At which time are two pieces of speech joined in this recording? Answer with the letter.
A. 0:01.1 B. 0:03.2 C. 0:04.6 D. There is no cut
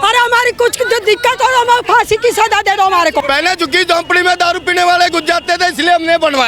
B